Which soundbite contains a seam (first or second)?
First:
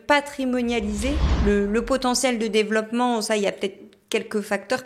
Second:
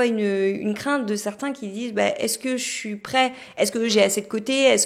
first